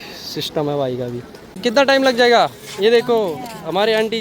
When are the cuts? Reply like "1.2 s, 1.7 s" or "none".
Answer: 1.3 s

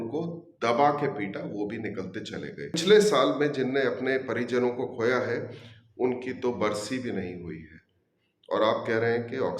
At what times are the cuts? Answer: 2.8 s

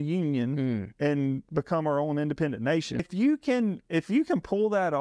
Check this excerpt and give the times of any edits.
3.0 s

